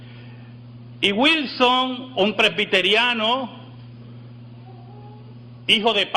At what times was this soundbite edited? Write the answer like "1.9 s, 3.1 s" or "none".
1.7 s